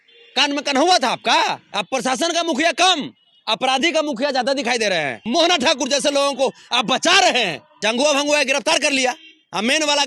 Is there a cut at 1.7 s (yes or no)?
yes